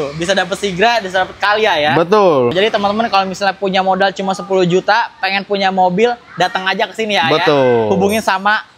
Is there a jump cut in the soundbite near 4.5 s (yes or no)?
no